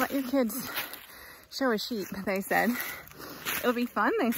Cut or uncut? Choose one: uncut